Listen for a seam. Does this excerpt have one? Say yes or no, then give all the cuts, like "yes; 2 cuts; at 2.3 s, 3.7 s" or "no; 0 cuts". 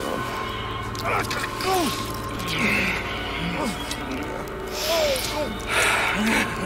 no; 0 cuts